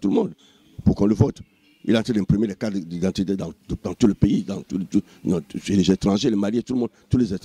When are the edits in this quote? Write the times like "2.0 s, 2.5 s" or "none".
none

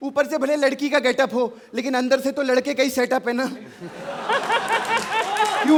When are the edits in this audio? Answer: none

